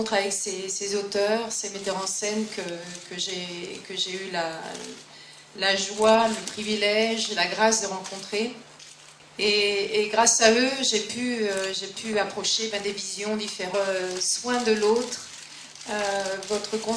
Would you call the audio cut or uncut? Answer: uncut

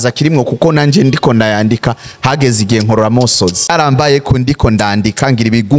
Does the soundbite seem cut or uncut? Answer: cut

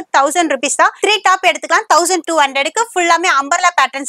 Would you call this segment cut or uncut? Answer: cut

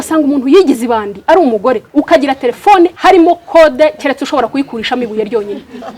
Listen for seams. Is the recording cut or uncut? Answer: cut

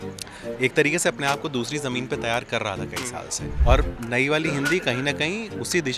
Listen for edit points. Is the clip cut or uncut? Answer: cut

